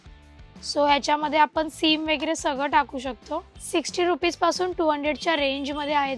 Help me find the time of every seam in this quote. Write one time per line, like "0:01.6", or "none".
0:03.6